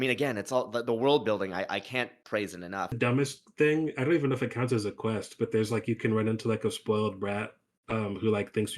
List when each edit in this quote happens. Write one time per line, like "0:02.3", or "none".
0:02.9